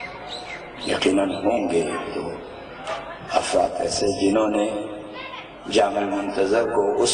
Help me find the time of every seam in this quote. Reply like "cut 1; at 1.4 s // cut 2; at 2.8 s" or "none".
cut 1; at 5.6 s